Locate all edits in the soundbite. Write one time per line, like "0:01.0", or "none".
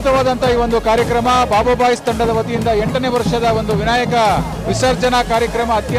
none